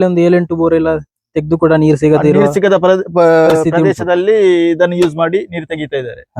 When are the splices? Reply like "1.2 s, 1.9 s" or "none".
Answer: none